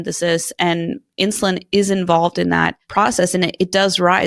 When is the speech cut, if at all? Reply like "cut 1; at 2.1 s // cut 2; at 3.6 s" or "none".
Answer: cut 1; at 2.8 s

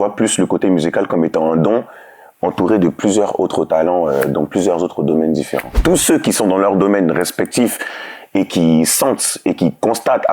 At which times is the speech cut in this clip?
cut 1; at 5.8 s

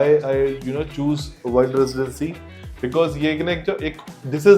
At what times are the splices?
none

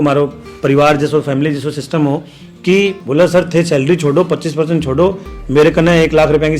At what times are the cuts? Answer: cut 1; at 3.0 s

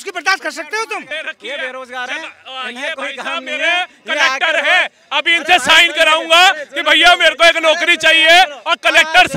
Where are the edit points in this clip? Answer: cut 1; at 1.1 s

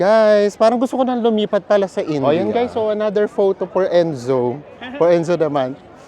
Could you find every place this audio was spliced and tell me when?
cut 1; at 2.3 s

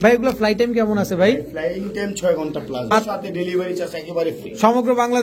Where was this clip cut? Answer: cut 1; at 2.9 s

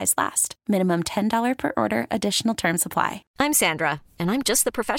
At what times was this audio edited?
cut 1; at 3.2 s

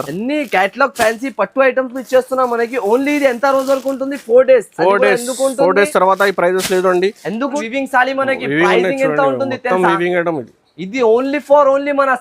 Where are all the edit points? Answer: cut 1; at 7.6 s

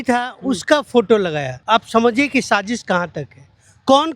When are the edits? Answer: cut 1; at 1.5 s

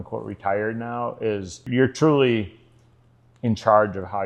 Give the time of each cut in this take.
cut 1; at 1.7 s

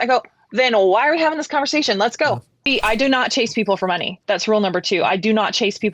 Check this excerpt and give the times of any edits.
cut 1; at 2.7 s

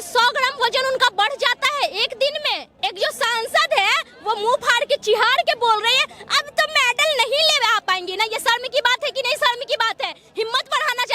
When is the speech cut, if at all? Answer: cut 1; at 2.7 s

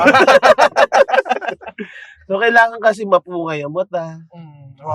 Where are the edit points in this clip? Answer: none

